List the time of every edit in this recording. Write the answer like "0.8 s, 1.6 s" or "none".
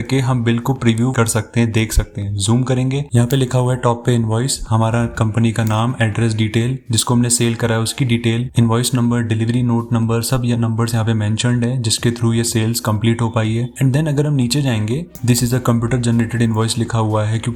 none